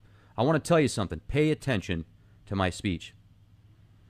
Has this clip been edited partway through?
yes; 1 cut; at 0.9 s

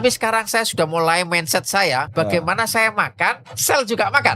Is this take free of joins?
no; 1 cut; at 2.1 s

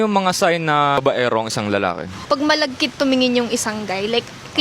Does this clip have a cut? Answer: yes; 2 cuts; at 1.0 s, 2.3 s

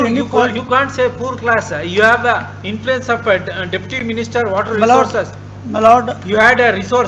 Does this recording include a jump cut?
no; 0 cuts

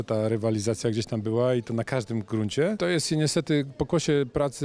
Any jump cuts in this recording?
yes; 1 cut; at 2.8 s

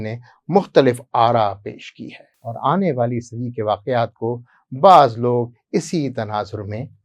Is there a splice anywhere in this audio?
no; 0 cuts

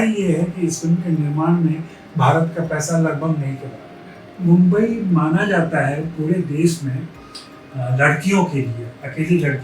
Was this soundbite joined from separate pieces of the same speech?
yes; 1 cut; at 4.4 s

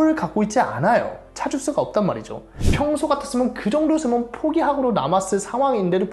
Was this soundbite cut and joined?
yes; 1 cut; at 2.5 s

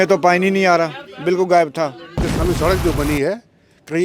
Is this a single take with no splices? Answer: no; 1 cut; at 2.2 s

